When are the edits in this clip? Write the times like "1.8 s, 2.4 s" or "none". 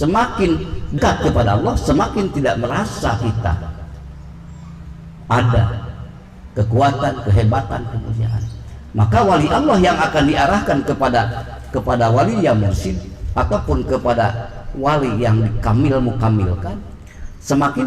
0.9 s